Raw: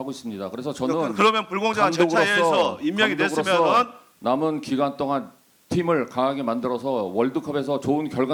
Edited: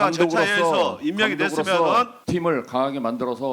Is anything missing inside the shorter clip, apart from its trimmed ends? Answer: yes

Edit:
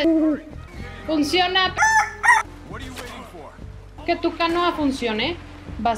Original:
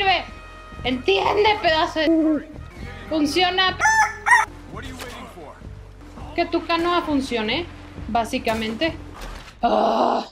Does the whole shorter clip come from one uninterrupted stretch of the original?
no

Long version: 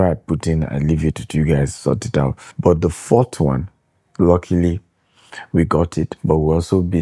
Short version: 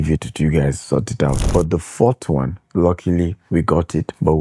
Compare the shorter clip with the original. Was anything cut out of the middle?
yes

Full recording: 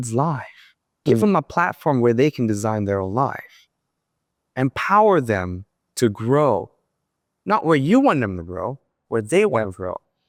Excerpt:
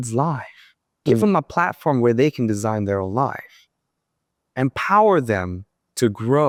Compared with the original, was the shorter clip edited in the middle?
no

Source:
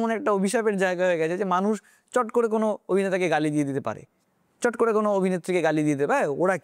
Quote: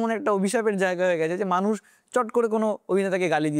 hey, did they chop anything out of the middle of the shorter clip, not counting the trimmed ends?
no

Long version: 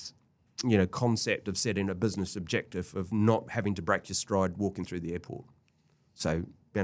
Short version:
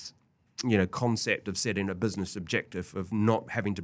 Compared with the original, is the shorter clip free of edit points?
yes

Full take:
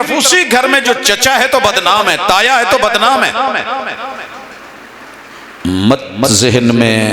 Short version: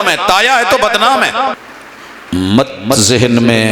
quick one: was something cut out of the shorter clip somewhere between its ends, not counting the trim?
yes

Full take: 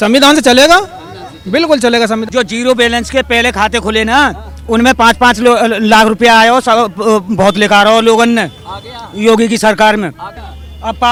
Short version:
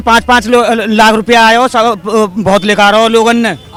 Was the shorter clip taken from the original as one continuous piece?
yes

